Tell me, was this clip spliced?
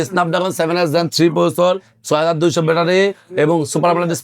no; 0 cuts

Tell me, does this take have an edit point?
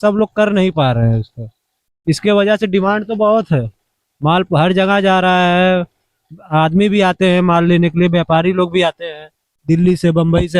no; 0 cuts

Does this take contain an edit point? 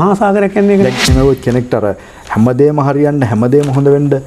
yes; 1 cut; at 1.0 s

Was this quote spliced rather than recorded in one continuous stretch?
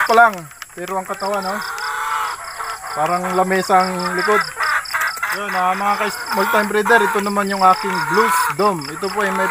yes; 1 cut; at 5.4 s

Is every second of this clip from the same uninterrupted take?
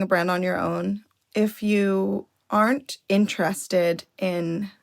no; 1 cut; at 1.1 s

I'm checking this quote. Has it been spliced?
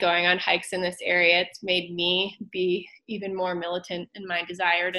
no; 0 cuts

